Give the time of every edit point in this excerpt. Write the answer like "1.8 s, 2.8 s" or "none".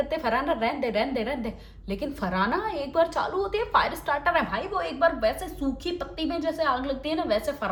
none